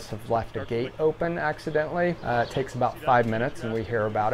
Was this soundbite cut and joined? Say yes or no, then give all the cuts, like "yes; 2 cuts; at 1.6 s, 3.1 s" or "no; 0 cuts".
yes; 1 cut; at 2.2 s